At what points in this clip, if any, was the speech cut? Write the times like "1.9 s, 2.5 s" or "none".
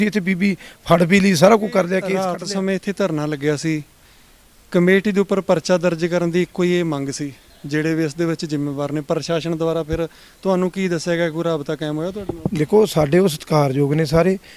2.3 s